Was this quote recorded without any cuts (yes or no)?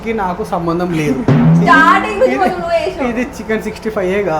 no